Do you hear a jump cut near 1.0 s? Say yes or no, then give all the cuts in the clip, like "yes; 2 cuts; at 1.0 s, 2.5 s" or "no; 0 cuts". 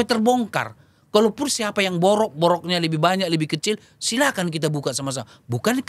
no; 0 cuts